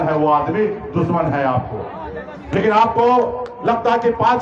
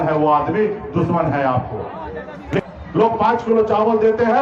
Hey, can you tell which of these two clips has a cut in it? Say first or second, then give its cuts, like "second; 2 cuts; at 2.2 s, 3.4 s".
second; 1 cut; at 2.6 s